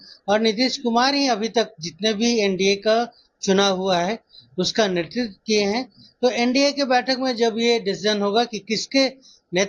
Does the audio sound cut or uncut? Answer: uncut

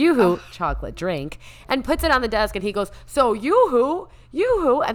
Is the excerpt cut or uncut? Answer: uncut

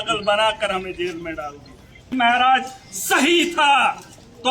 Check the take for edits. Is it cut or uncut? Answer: cut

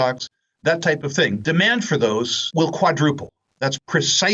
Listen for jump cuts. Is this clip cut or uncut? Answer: cut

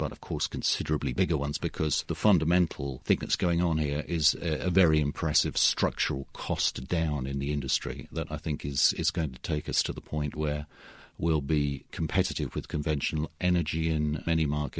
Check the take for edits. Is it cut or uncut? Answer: uncut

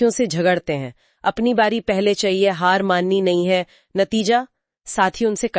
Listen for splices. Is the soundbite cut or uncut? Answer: uncut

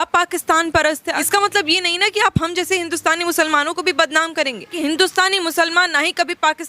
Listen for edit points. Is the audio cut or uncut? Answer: cut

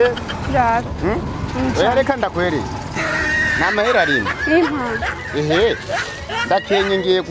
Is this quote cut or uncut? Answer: uncut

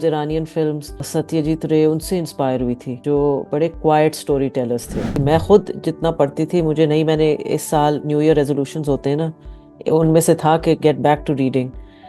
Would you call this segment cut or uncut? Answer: cut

